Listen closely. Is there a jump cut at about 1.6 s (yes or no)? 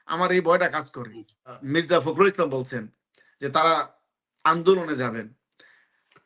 yes